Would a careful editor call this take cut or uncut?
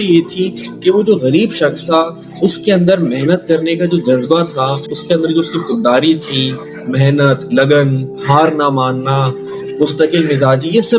uncut